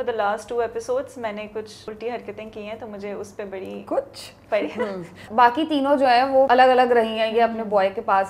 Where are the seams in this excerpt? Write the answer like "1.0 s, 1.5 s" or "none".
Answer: 1.8 s, 5.2 s, 6.5 s